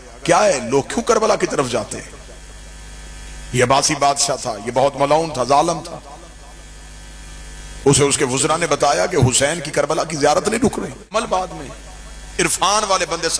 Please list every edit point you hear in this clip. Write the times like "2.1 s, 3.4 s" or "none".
11.1 s